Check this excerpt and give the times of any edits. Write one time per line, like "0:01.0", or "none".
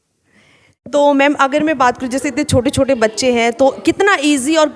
0:00.9

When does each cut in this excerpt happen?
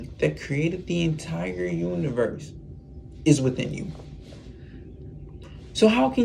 none

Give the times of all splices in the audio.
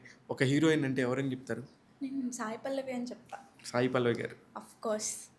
none

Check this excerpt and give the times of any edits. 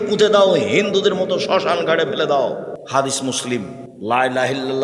0:02.8
0:03.8

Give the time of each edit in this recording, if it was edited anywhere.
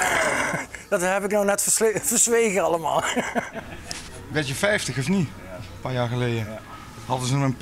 none

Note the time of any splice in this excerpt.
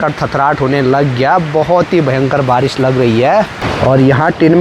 0:03.6

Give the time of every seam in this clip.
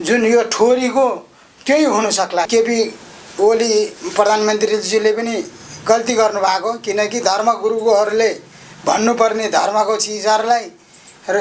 0:02.5

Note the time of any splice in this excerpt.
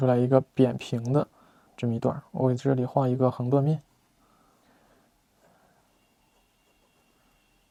none

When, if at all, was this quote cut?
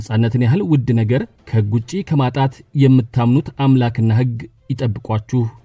none

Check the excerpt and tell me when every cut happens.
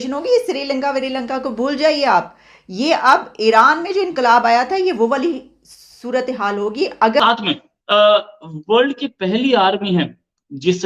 0:07.2

